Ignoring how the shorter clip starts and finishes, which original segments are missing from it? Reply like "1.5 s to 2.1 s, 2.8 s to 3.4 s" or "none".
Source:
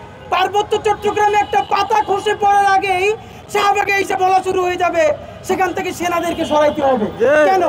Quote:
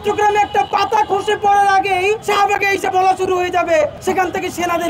3.2 s to 3.5 s, 5.2 s to 5.4 s